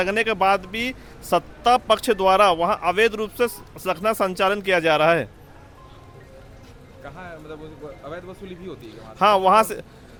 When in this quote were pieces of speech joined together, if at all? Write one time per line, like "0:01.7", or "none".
none

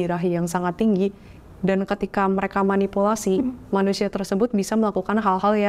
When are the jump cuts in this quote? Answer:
none

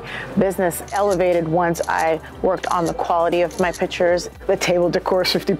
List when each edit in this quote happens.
0:00.9
0:04.3

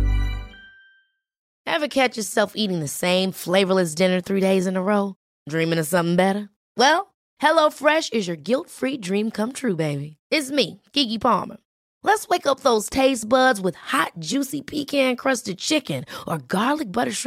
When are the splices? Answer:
0:01.4

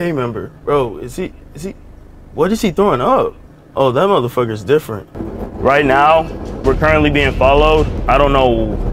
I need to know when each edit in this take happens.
0:00.9

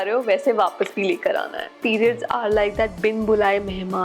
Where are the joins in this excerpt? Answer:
0:01.8

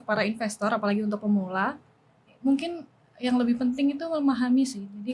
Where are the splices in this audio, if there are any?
none

